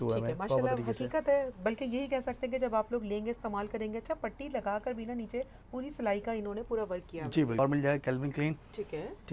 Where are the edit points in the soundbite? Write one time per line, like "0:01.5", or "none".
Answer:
0:07.6